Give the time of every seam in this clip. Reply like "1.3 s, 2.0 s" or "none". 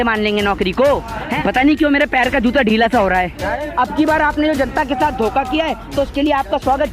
1.3 s, 3.6 s